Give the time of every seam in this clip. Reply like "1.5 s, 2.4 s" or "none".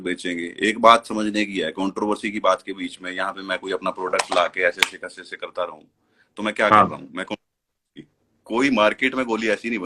8.0 s

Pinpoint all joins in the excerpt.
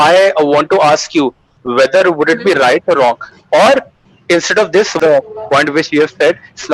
5.0 s

